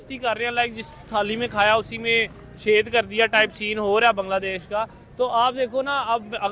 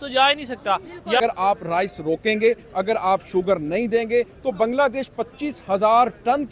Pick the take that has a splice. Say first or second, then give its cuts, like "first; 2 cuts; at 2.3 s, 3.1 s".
second; 1 cut; at 1.2 s